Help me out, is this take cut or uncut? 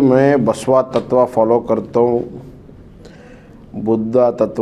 uncut